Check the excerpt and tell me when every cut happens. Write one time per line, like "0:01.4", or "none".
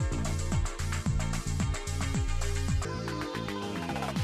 0:02.8